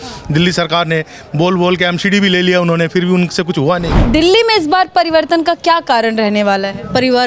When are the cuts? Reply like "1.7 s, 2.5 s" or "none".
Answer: 4.0 s